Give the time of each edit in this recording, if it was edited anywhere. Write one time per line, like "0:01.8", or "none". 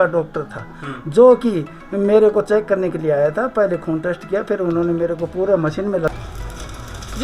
0:06.1